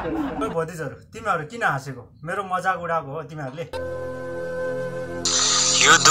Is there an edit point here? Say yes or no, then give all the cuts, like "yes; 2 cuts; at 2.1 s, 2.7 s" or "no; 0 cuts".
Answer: yes; 1 cut; at 3.7 s